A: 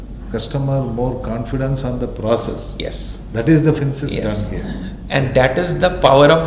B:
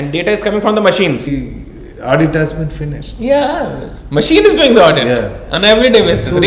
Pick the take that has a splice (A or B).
B